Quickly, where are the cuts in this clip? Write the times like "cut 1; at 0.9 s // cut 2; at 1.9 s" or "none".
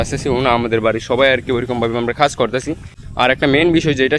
cut 1; at 2.9 s